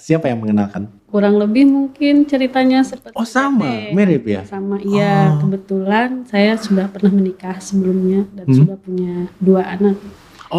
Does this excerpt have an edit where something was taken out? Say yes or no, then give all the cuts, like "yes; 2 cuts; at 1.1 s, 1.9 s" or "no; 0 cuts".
no; 0 cuts